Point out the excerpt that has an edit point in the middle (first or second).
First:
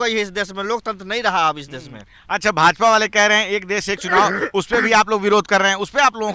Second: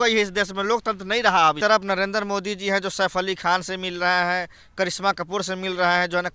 second